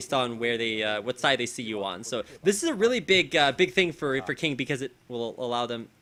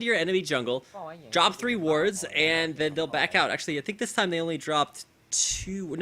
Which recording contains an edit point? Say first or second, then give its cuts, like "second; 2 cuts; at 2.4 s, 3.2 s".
second; 1 cut; at 2.0 s